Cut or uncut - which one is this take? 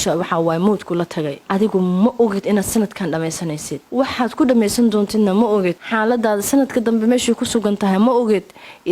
cut